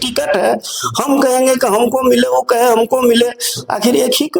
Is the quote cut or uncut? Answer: uncut